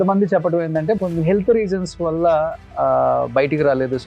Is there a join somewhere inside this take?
yes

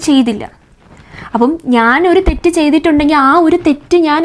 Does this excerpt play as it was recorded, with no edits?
yes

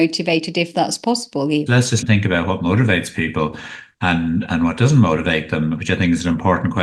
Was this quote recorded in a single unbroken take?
no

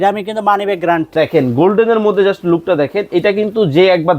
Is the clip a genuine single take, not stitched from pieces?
no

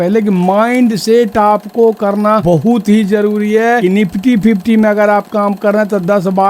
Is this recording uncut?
no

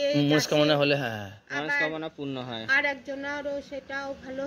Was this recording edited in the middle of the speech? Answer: no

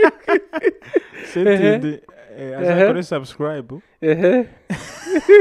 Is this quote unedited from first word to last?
yes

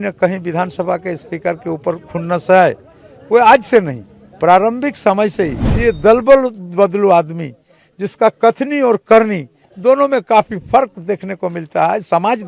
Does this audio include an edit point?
yes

